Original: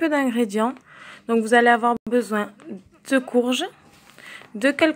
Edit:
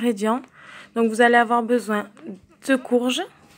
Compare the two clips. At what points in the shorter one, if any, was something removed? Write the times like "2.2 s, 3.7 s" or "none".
1.6 s